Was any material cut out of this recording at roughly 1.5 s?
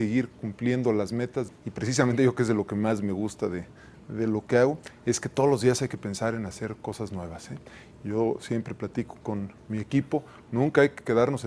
yes; 1 cut; at 1.5 s

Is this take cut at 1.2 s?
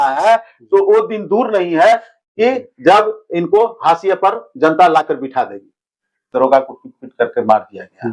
no; 1 cut; at 6.2 s

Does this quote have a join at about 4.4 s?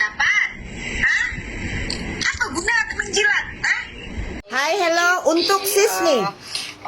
yes; 1 cut; at 4.4 s

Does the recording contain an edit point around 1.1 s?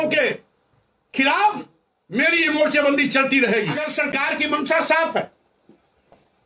no; 1 cut; at 3.9 s

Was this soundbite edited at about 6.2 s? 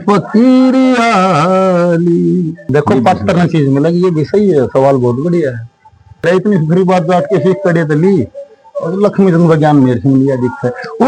yes; 2 cuts; at 2.5 s, 6.2 s

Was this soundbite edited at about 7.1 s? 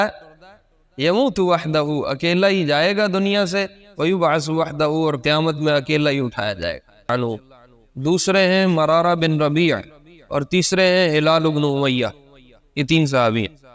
yes; 1 cut; at 7.1 s

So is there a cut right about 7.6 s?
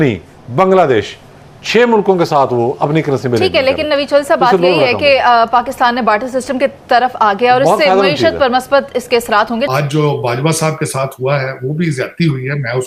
no; 0 cuts

